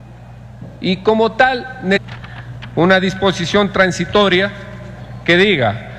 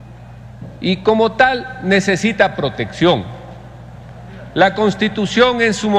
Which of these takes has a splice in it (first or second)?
second